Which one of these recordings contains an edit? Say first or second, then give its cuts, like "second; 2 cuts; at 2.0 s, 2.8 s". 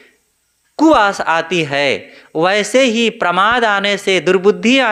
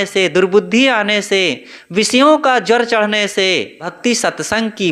second; 1 cut; at 3.9 s